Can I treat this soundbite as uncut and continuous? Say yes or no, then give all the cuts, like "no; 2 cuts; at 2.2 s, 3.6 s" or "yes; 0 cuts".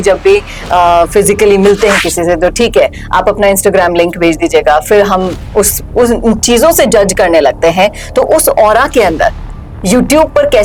yes; 0 cuts